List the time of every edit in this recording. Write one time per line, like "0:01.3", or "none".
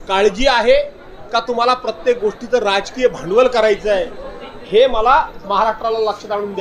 none

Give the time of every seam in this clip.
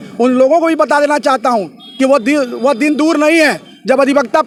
none

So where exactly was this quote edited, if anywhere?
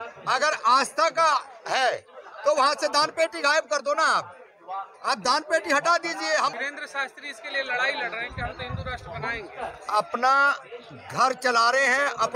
0:06.6

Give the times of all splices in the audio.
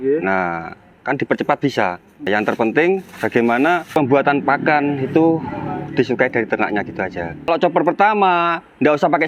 0:02.3
0:03.9
0:07.5

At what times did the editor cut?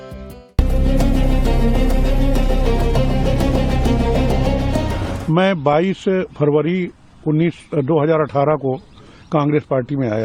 none

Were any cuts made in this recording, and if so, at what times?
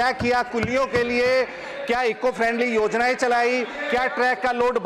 none

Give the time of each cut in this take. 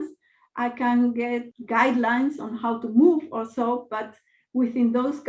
0:01.5

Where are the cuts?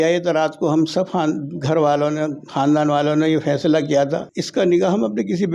0:04.4

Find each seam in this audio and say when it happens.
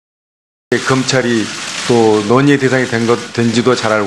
0:02.5

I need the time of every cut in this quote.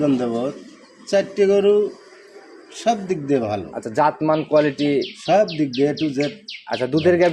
none

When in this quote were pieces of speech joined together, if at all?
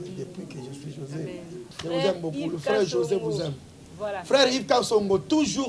0:01.7

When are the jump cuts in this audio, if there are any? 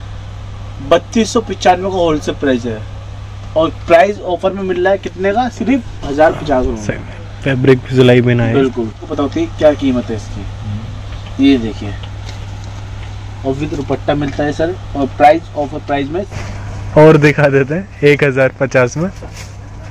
0:09.0
0:16.5

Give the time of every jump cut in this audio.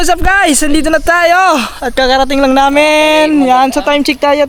none

